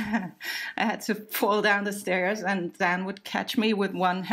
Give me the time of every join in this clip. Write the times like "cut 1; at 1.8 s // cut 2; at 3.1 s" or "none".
none